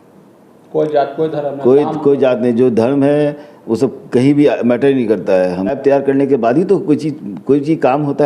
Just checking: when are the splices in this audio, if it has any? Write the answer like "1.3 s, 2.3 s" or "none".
5.8 s